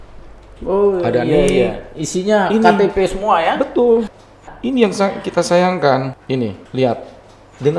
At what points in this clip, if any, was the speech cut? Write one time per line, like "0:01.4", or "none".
none